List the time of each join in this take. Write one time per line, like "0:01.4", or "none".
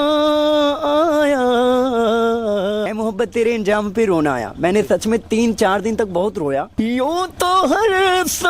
0:02.9
0:06.7